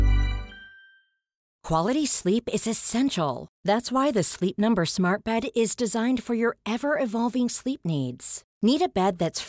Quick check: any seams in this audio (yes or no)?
yes